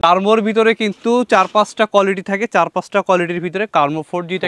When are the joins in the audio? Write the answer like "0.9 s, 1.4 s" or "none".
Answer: none